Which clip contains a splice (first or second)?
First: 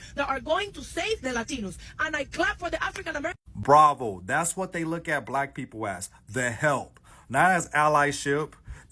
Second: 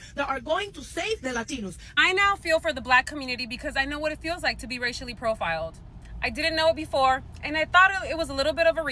second